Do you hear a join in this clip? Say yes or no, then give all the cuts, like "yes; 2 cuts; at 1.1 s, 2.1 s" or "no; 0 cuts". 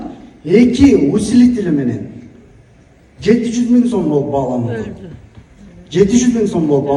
no; 0 cuts